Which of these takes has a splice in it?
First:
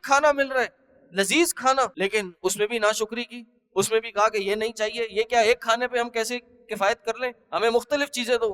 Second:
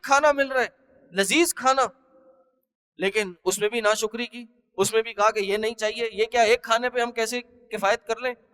first; 1 cut; at 1.9 s

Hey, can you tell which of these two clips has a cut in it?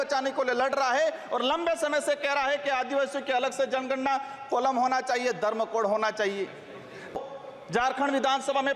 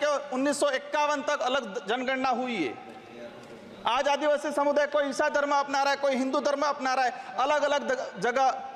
first; 1 cut; at 7.2 s

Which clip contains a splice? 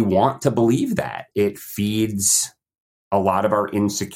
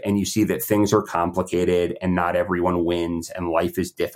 first; 1 cut; at 1.2 s

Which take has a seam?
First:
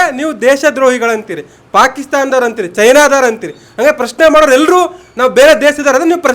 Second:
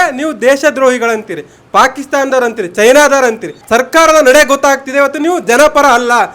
second; 1 cut; at 3.5 s

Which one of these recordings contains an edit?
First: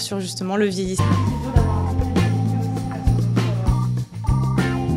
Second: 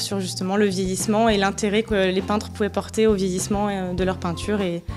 second; 1 cut; at 1.0 s

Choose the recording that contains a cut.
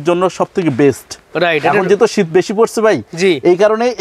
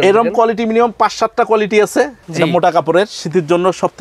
second; 1 cut; at 2.2 s

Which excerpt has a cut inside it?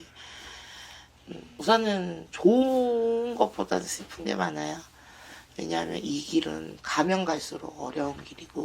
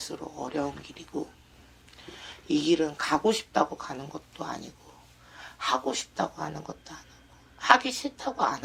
first; 1 cut; at 1.5 s

